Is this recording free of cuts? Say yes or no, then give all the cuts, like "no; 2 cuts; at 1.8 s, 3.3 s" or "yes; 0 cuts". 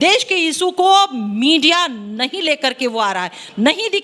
yes; 0 cuts